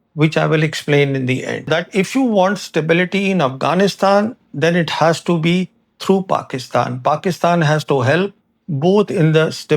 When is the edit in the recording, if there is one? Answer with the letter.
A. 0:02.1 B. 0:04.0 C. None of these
A